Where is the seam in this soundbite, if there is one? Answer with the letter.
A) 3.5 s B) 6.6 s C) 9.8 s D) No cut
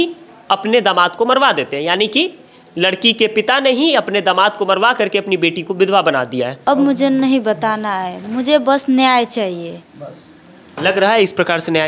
B